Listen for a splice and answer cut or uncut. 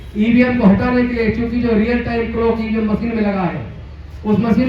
uncut